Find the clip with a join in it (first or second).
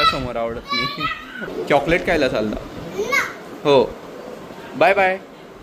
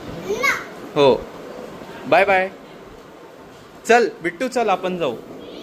first